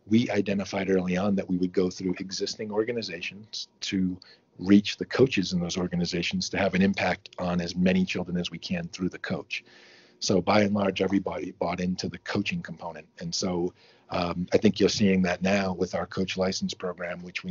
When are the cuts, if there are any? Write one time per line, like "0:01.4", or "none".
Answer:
none